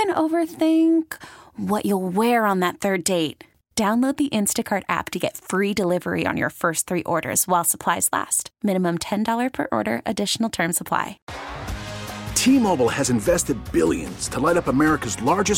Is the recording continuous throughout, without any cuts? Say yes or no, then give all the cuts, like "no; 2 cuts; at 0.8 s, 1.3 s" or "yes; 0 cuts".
no; 1 cut; at 11.3 s